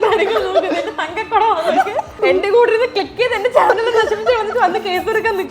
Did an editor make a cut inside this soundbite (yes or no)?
yes